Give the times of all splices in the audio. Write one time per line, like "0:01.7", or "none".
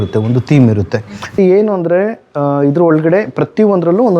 0:01.4